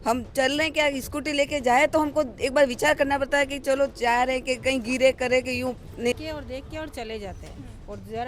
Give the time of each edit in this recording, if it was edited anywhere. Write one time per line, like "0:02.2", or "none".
0:06.2

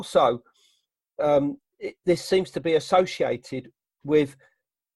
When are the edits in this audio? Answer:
none

